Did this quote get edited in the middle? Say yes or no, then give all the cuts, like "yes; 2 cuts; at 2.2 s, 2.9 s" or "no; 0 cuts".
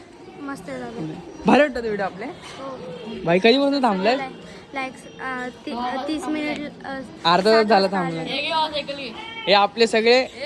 no; 0 cuts